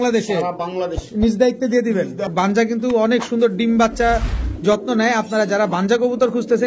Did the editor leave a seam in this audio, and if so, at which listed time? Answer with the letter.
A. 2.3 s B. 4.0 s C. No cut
A